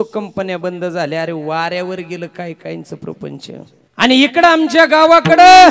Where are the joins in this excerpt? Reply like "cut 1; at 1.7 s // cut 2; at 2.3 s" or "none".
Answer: cut 1; at 3.8 s